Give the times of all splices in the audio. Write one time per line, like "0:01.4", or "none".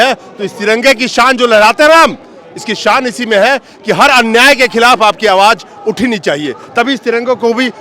none